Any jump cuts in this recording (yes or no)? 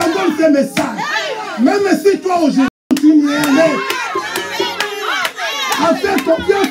yes